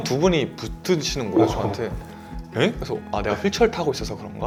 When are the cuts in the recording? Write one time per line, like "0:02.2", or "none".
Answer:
none